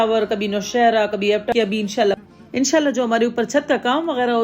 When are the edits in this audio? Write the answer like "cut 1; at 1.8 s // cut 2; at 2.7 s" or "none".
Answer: cut 1; at 1.5 s